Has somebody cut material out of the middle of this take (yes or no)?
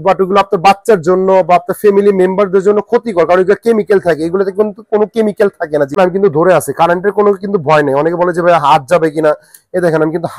yes